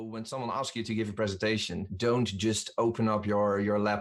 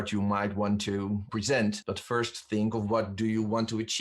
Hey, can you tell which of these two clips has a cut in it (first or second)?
second